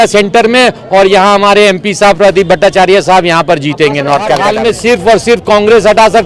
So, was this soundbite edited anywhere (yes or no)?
yes